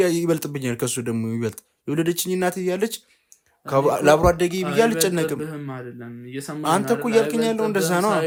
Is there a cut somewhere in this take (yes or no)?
no